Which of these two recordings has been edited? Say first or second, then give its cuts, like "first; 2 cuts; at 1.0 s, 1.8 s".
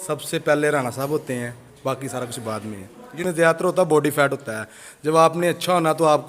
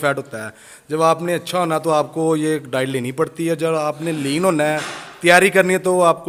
first; 1 cut; at 3.2 s